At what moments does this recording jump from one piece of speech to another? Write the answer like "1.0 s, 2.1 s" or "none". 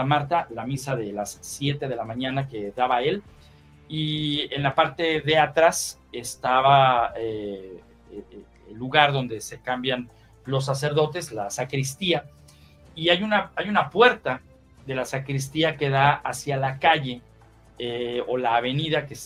none